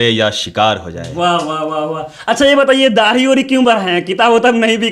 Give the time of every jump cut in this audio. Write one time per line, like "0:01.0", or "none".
none